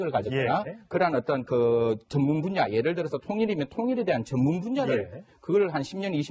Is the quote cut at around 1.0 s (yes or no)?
yes